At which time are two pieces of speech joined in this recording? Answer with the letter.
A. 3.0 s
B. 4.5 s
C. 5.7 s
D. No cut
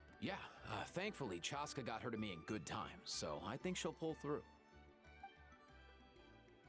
B